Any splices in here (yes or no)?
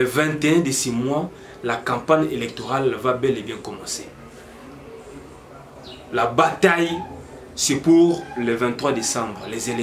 no